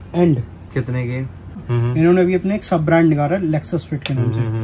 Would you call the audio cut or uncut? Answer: cut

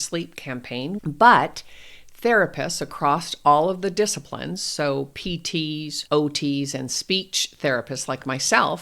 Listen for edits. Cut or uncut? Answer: cut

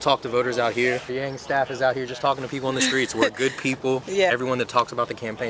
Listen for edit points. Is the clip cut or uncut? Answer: cut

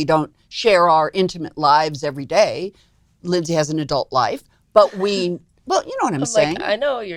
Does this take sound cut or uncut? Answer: uncut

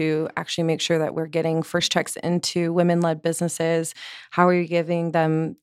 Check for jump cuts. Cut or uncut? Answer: uncut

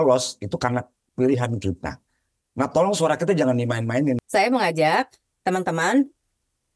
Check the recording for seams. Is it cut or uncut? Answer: cut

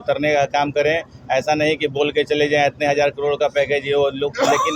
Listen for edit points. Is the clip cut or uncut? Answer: uncut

